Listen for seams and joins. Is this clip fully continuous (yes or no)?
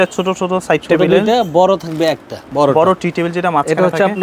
no